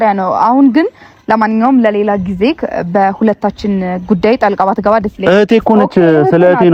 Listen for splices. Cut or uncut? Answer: uncut